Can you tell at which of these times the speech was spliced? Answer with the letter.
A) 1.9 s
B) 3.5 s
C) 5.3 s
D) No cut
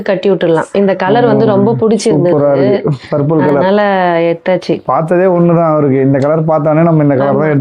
D